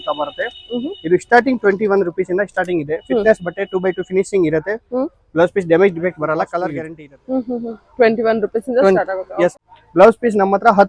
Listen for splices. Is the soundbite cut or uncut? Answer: cut